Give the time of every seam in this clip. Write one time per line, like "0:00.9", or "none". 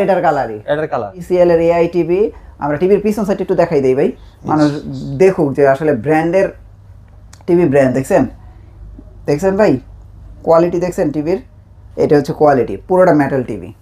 0:01.2